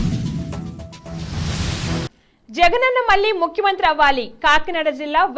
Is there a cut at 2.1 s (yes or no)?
yes